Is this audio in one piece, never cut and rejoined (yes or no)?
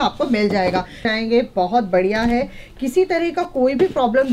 no